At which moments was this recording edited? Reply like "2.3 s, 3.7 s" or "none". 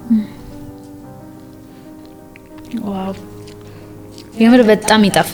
none